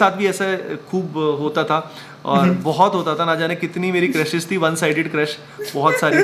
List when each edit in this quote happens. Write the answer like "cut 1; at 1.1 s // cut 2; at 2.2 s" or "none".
none